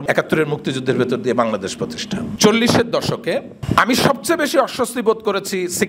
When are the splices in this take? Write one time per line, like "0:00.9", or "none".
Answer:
0:02.3